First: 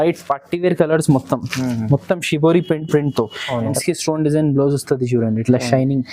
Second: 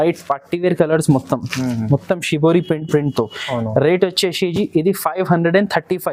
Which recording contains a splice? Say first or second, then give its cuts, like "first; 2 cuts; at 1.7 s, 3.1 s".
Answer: first; 1 cut; at 3.7 s